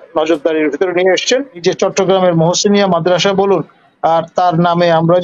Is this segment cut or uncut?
cut